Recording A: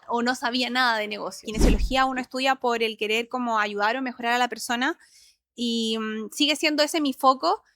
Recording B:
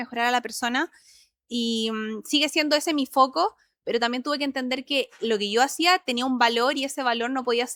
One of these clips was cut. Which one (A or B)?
A